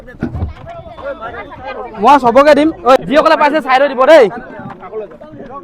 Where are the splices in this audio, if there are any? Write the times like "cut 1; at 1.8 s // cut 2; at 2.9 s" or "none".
cut 1; at 3.0 s